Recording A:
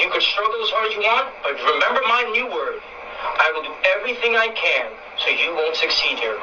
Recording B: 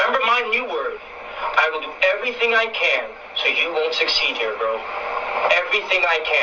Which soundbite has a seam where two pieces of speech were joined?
B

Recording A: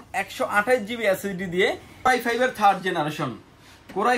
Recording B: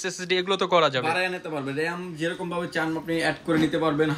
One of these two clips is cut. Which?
A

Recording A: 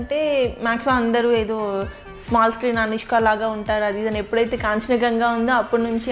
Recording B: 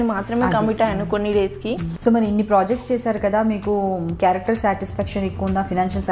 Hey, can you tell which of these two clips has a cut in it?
B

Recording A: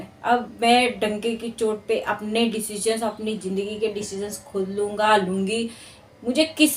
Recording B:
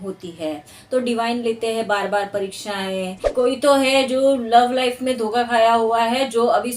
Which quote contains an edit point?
B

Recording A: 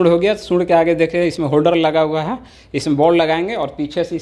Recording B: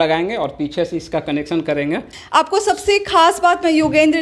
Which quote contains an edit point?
B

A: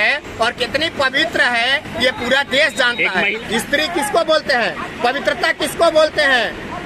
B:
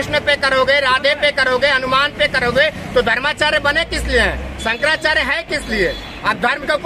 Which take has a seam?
A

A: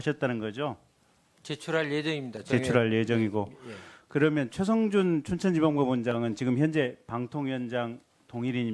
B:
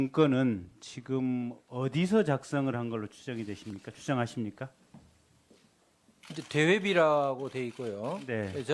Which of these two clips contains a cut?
B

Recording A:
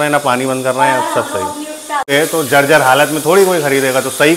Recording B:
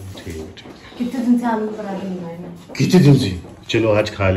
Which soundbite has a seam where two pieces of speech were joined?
A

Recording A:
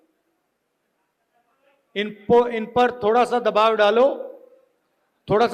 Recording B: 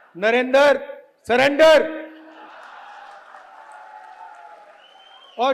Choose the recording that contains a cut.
B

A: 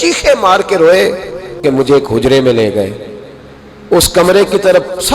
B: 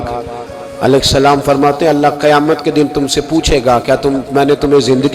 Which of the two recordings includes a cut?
A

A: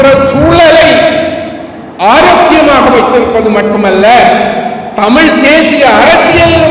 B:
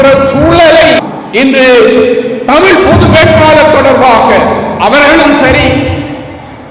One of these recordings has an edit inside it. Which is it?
B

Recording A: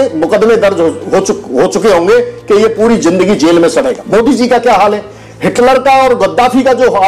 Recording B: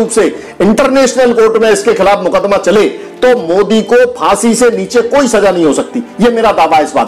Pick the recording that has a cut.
A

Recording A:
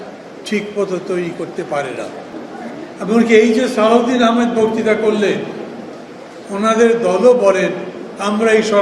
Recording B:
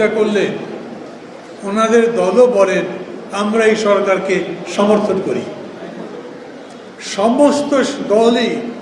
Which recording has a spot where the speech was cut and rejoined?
A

